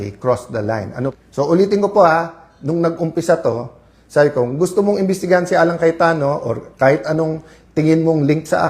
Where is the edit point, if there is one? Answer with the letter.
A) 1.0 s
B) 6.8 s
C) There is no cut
A